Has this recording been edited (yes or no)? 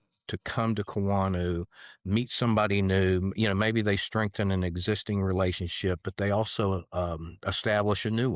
no